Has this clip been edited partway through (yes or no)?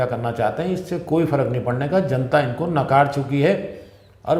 no